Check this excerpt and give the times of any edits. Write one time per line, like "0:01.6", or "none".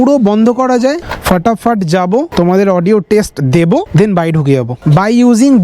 0:01.0
0:04.8